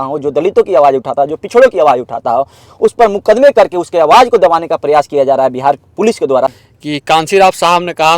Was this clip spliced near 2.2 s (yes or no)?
no